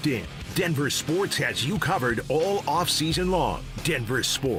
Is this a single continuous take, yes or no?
yes